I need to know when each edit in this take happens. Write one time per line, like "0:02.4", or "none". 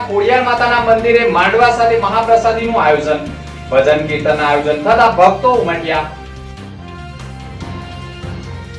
none